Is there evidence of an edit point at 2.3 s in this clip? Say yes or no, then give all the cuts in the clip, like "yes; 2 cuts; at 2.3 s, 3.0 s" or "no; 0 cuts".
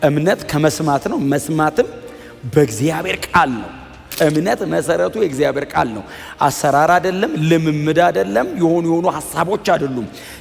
no; 1 cut; at 4.0 s